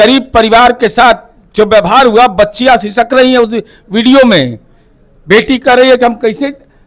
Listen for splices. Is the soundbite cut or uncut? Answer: uncut